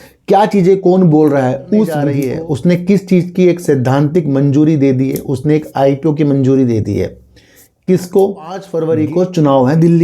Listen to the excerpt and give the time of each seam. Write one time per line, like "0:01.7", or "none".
0:02.1
0:08.7